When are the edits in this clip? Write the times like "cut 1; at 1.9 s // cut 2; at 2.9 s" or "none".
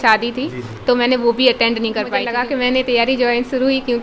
cut 1; at 2.2 s

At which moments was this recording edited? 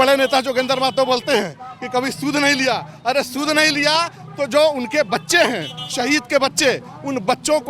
none

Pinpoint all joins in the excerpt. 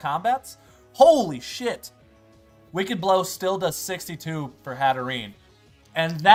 none

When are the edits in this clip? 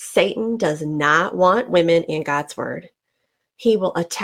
none

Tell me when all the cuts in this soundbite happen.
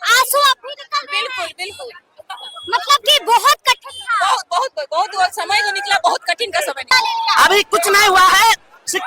cut 1; at 6.9 s

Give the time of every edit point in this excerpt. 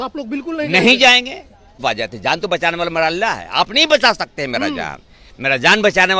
cut 1; at 1.8 s

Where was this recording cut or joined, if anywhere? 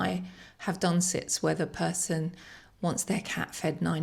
none

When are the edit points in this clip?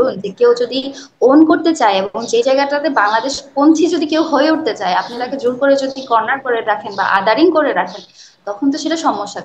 none

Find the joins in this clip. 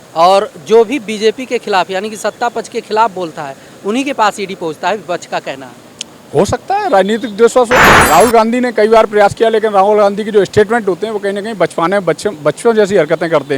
cut 1; at 7.9 s

